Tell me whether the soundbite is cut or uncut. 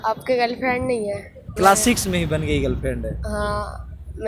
cut